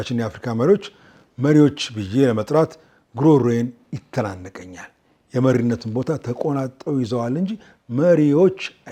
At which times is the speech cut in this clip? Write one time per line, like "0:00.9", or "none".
none